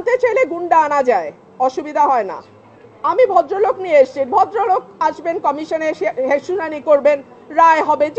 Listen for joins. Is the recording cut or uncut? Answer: uncut